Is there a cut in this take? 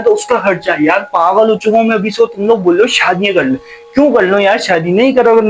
no; 0 cuts

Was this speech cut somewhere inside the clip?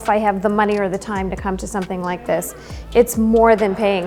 no; 0 cuts

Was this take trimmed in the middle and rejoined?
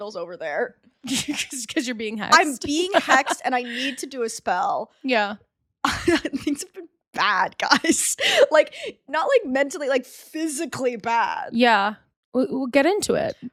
no; 0 cuts

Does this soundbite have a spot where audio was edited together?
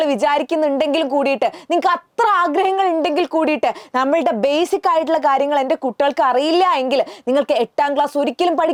no; 0 cuts

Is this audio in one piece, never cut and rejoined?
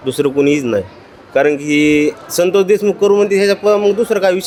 yes; 0 cuts

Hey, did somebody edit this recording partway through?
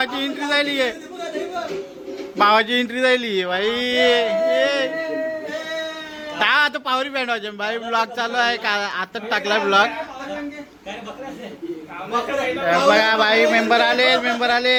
no; 0 cuts

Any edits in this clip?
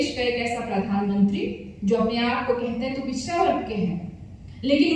no; 0 cuts

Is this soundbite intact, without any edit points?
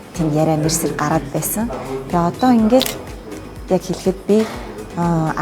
yes; 0 cuts

